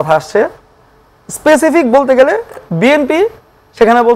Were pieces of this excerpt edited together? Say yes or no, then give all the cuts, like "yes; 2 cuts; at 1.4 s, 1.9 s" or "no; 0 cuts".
no; 0 cuts